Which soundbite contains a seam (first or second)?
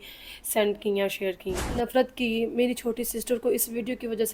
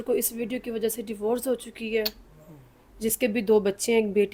first